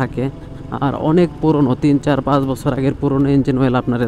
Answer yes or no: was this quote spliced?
no